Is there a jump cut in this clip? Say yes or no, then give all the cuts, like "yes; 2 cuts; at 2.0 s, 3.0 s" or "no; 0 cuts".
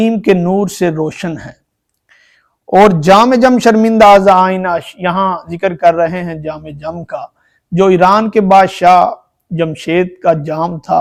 no; 0 cuts